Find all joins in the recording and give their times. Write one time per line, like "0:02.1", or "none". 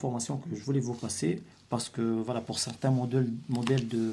none